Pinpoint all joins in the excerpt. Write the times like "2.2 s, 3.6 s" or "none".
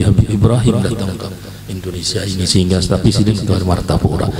none

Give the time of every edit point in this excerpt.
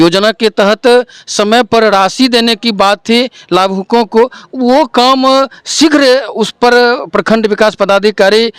none

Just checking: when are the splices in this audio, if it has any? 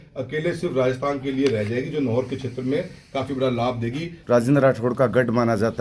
4.2 s

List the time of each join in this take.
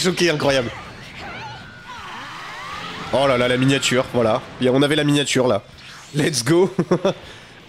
none

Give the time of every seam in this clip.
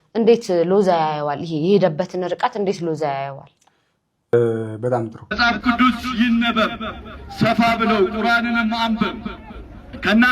5.2 s

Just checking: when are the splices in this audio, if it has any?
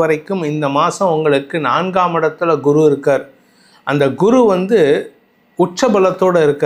none

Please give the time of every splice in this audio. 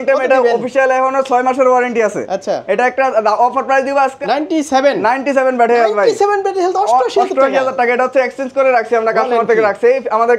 4.2 s

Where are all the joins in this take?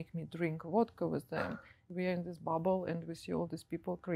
1.8 s

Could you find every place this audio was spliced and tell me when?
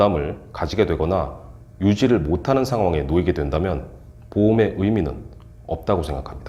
none

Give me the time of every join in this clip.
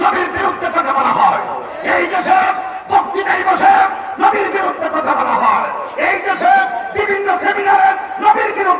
none

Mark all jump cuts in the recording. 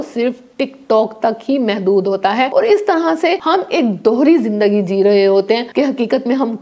2.5 s, 3.4 s, 5.7 s

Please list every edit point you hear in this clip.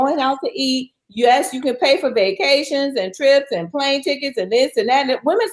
none

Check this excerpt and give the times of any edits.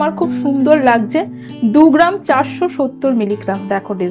none

